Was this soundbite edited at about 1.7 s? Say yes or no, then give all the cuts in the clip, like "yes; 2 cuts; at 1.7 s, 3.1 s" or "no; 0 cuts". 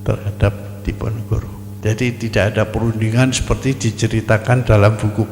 yes; 1 cut; at 1.7 s